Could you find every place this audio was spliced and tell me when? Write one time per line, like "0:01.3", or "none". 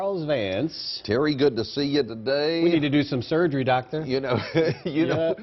0:00.9